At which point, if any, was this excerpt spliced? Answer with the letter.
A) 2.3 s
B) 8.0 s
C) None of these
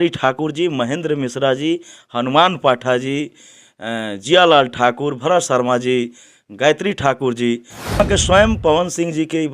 B